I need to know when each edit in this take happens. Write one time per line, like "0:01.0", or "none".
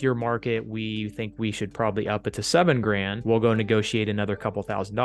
0:03.1